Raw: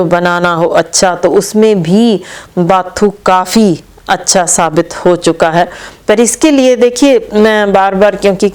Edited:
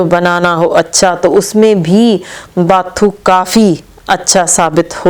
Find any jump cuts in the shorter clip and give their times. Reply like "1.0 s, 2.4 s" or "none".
none